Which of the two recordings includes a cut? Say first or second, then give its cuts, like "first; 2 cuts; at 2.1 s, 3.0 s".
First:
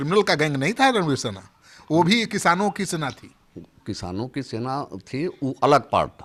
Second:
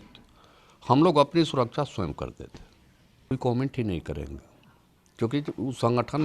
second; 1 cut; at 3.3 s